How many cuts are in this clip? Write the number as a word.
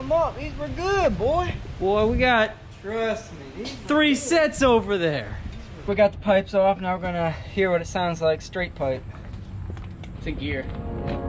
two